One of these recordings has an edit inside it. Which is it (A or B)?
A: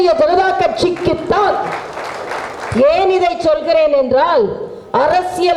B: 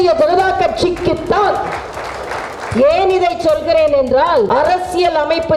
B